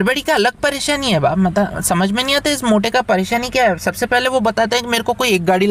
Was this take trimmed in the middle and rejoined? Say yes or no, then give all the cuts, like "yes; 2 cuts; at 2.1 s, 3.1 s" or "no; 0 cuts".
no; 0 cuts